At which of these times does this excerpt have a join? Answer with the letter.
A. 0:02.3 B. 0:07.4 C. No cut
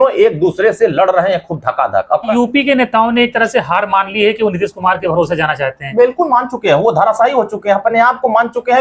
A